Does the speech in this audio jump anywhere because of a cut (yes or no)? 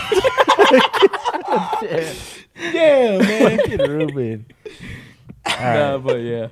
no